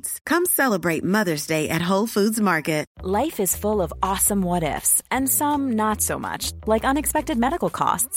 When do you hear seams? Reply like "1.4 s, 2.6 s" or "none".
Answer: 2.9 s